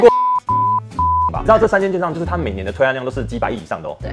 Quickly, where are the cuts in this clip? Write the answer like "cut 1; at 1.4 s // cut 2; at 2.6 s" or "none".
cut 1; at 1.4 s